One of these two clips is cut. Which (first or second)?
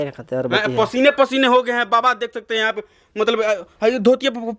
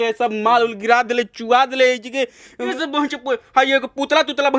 second